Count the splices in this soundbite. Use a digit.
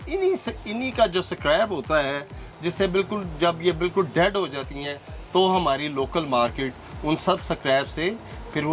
0